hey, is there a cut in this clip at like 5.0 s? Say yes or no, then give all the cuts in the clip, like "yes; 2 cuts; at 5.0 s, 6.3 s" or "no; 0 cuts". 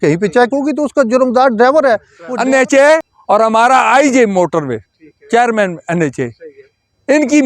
no; 2 cuts; at 2.2 s, 3.1 s